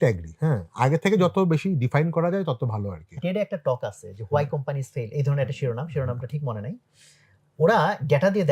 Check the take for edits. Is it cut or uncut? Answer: cut